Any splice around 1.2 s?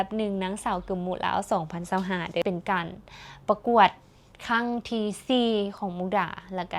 no; 1 cut; at 2.4 s

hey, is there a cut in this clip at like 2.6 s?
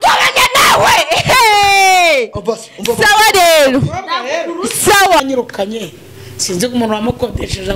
no; 1 cut; at 5.2 s

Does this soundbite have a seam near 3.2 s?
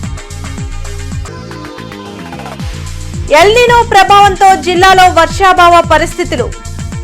no; 0 cuts

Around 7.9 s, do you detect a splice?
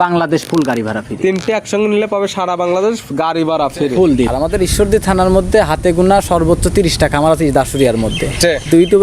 no; 1 cut; at 4.3 s

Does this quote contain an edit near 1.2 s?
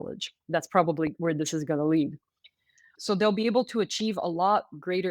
yes; 2 cuts; at 1.2 s, 2.9 s

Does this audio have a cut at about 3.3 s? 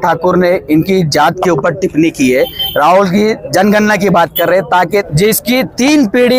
no; 1 cut; at 5.1 s

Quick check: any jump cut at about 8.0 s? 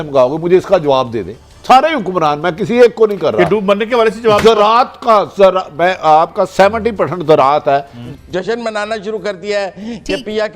yes; 1 cut; at 8.0 s

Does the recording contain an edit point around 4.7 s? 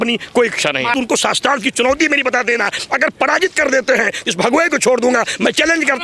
no; 1 cut; at 0.9 s

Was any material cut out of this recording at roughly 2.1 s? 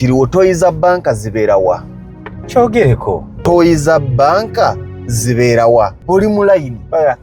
no; 2 cuts; at 3.4 s, 6.0 s

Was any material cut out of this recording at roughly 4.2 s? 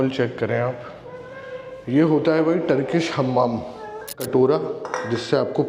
yes; 1 cut; at 4.2 s

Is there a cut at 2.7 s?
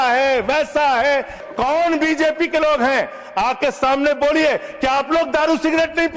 no; 1 cut; at 1.4 s

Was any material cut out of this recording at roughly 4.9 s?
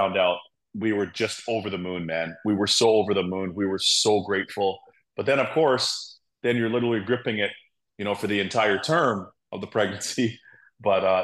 no; 0 cuts

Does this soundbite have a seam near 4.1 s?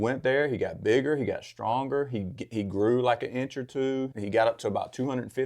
yes; 1 cut; at 4.1 s

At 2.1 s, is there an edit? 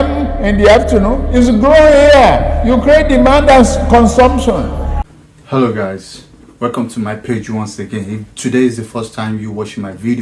no; 1 cut; at 5.0 s

